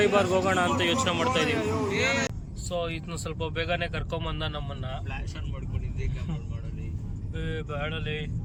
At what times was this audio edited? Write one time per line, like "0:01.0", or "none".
none